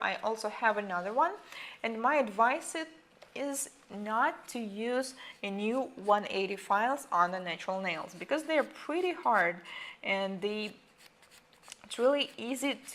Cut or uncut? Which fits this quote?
cut